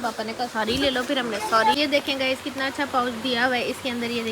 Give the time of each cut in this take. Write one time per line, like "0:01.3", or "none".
0:01.8